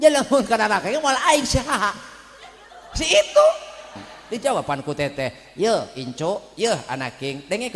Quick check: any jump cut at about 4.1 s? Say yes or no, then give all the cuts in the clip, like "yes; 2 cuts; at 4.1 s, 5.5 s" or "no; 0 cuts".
yes; 1 cut; at 4.1 s